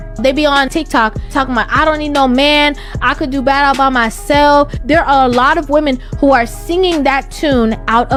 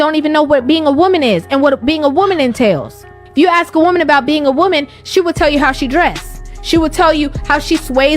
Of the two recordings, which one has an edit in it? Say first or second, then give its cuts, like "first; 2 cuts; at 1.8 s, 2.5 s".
second; 1 cut; at 1.7 s